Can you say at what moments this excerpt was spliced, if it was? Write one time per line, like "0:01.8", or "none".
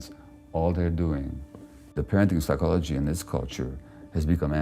0:02.0